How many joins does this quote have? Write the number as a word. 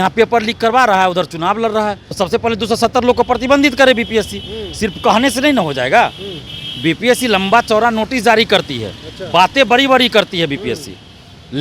one